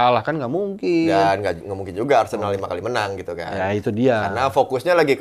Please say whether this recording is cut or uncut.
uncut